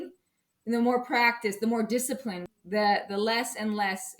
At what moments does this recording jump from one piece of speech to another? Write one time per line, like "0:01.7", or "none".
0:02.5